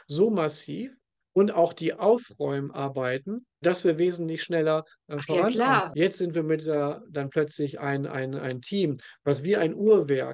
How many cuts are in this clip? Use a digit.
1